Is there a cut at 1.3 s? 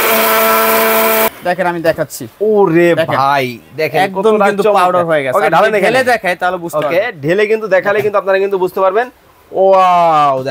yes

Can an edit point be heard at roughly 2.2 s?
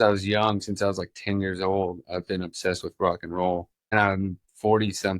no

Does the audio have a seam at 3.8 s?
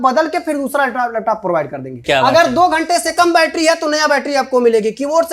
no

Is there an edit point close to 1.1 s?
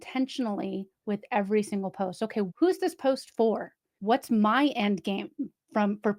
no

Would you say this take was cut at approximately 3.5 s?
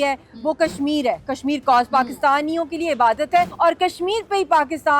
yes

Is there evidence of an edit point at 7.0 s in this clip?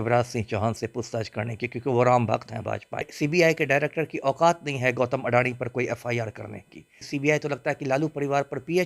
yes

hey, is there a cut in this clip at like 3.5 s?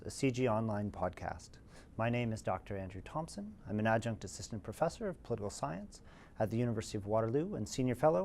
no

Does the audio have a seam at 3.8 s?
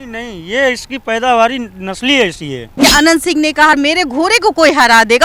yes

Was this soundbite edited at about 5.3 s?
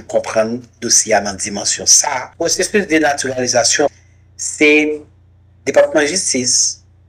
no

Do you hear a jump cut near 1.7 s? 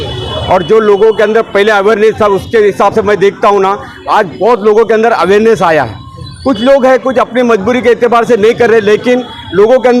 no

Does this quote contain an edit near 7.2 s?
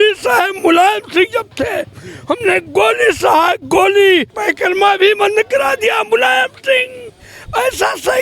no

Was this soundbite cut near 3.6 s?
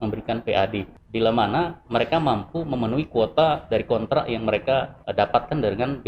no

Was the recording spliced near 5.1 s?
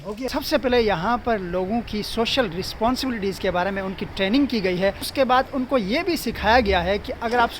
yes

